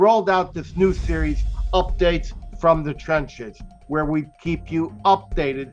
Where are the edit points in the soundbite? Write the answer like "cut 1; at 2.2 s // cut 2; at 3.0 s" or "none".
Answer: cut 1; at 4.3 s